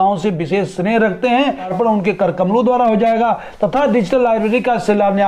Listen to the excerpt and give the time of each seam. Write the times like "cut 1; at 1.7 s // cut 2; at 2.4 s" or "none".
cut 1; at 1.7 s

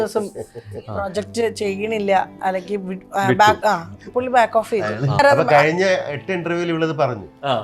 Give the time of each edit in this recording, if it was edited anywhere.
cut 1; at 5.2 s

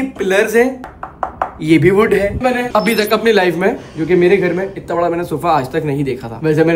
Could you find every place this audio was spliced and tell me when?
cut 1; at 2.4 s

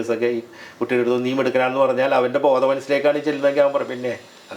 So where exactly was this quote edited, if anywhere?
none

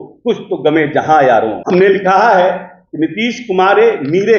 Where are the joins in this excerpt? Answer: cut 1; at 1.6 s

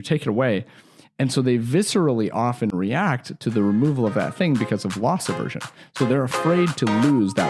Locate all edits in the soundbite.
none

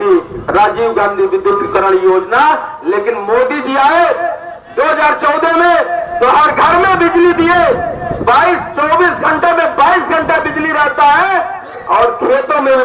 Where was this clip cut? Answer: none

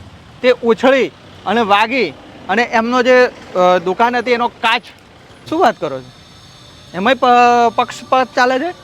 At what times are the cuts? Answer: cut 1; at 5.3 s

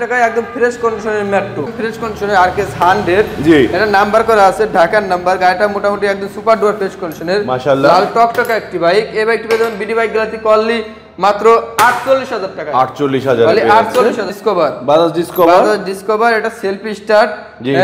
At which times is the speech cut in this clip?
cut 1; at 1.7 s // cut 2; at 14.3 s

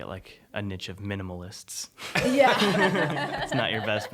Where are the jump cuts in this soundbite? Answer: none

